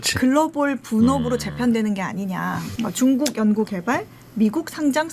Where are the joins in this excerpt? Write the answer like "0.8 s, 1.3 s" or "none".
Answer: 2.7 s

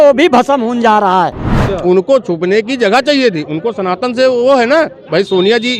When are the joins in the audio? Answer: 1.5 s

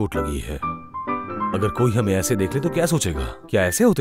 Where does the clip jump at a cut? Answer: 1.5 s

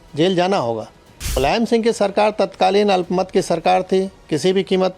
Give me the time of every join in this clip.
1.4 s

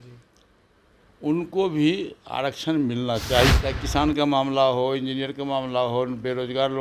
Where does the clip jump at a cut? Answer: 3.5 s

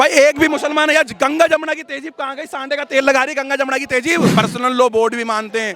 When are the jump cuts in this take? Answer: 4.3 s

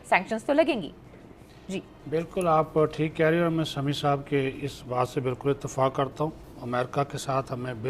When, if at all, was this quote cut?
none

